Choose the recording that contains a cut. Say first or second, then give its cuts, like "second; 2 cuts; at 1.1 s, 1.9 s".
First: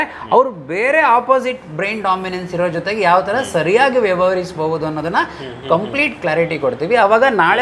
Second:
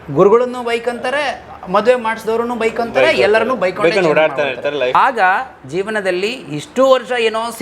second; 1 cut; at 5.0 s